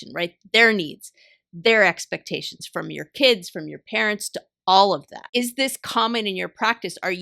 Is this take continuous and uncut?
no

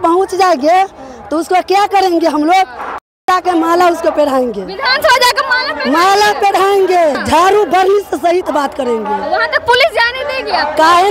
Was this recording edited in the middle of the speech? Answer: no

